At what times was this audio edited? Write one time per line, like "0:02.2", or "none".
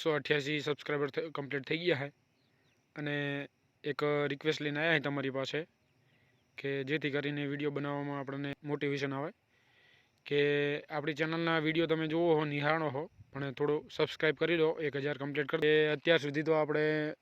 0:08.6
0:15.6